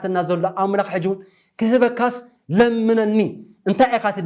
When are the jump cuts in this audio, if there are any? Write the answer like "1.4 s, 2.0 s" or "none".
none